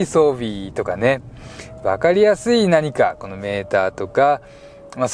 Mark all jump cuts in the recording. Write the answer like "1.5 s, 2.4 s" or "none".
none